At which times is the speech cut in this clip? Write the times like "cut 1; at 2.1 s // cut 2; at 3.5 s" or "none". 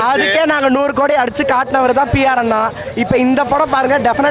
none